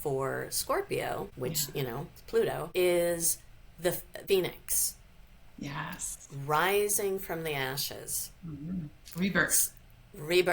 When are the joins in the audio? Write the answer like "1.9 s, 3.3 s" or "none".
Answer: none